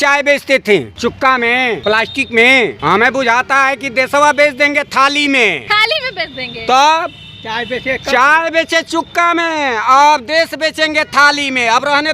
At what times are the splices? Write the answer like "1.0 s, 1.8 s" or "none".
0.9 s, 1.8 s, 2.8 s, 5.6 s